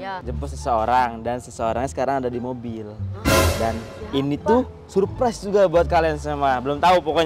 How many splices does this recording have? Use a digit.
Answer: 0